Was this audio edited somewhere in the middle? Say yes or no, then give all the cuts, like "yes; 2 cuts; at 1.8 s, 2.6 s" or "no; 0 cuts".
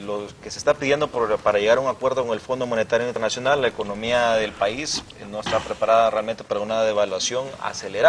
yes; 1 cut; at 6.4 s